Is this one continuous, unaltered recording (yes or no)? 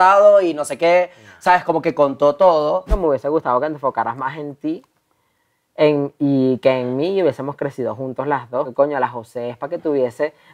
no